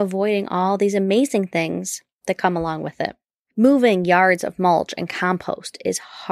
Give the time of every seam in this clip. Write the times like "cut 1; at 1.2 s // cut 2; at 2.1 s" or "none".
cut 1; at 3.2 s